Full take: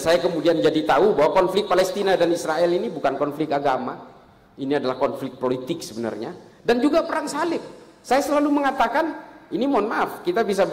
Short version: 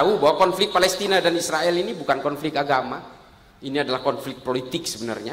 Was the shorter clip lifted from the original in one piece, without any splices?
yes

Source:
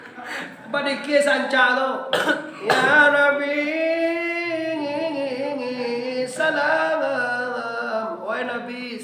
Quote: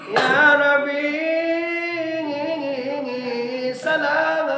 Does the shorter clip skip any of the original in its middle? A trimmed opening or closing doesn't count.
no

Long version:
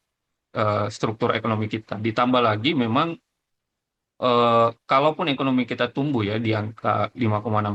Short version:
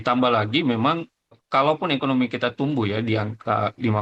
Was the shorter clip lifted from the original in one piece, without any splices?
no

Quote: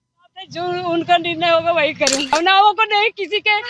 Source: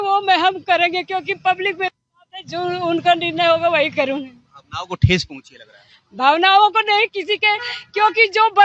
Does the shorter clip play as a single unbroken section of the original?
no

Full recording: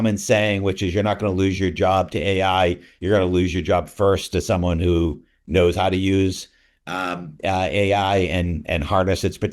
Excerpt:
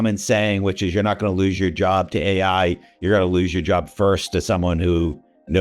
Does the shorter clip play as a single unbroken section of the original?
yes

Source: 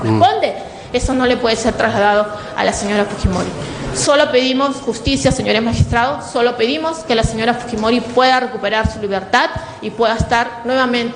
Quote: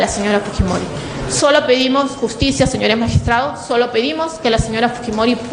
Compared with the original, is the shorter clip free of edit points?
yes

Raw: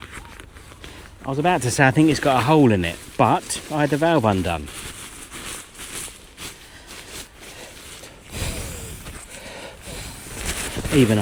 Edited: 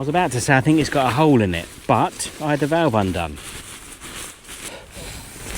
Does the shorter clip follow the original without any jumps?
no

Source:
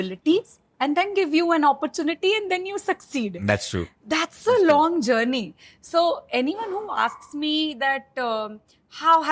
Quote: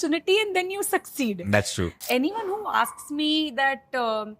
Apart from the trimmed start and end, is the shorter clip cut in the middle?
yes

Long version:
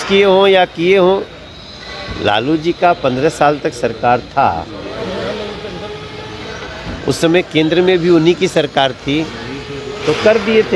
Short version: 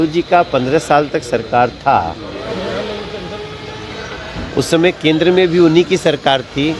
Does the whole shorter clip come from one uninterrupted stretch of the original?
yes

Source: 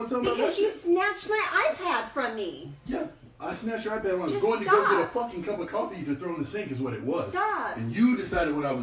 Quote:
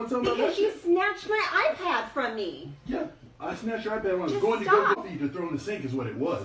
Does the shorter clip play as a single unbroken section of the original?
no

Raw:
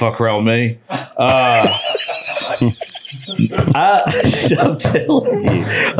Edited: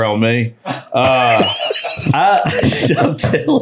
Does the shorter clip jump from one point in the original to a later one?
yes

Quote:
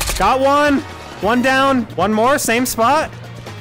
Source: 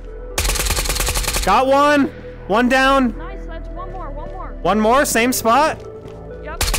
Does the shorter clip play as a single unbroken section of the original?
no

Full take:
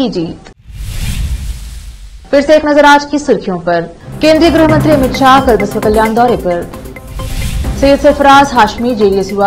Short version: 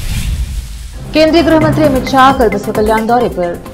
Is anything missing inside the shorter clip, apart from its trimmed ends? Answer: yes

